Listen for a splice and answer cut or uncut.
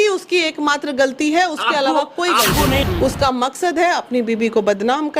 cut